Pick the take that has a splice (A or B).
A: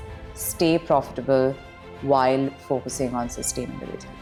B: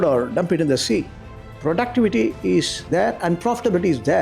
B